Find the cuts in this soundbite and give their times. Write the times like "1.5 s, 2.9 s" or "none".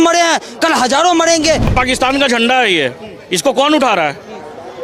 1.7 s